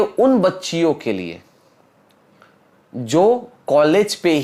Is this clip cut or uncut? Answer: uncut